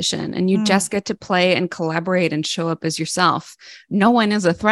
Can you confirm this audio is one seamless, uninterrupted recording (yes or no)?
yes